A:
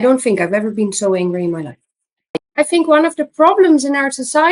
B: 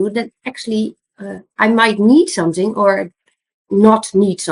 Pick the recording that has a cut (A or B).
A